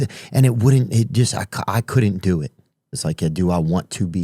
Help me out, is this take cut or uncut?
cut